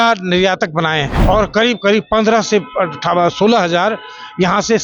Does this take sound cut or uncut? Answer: cut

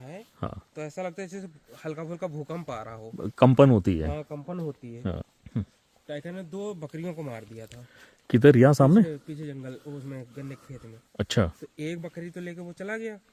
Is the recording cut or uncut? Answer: uncut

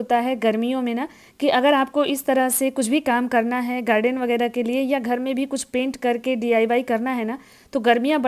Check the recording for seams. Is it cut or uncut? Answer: uncut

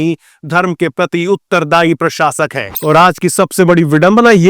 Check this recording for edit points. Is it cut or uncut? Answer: cut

